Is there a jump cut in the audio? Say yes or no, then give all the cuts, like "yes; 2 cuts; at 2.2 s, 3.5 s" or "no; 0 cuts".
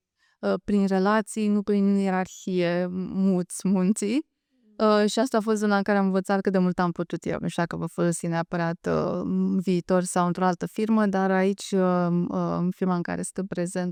no; 0 cuts